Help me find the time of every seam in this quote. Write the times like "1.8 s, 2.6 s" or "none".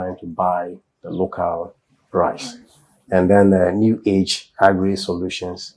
none

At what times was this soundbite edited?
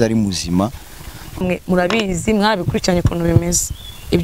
1.4 s

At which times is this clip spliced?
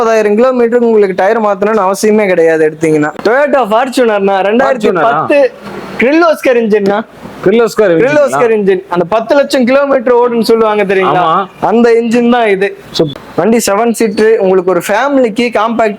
3.1 s, 13.1 s

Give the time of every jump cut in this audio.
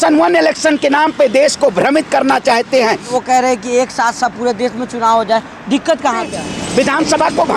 3.2 s, 6.3 s

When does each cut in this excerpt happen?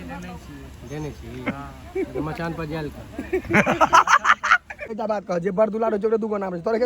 4.9 s

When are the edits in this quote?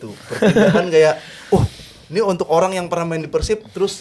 none

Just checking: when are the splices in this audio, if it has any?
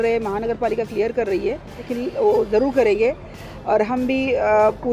1.8 s

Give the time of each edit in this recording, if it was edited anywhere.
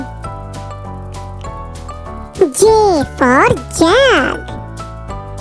4.4 s

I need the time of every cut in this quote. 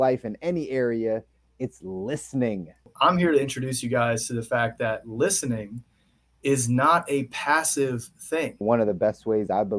2.9 s, 8.6 s

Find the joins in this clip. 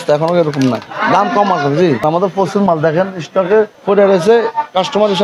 0.9 s, 2.0 s, 3.8 s

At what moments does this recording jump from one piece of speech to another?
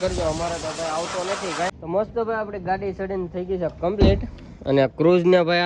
1.8 s

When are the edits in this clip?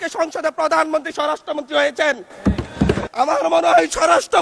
3.1 s

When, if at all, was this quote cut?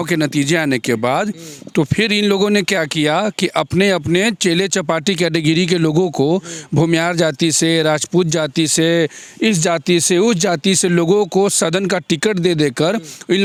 none

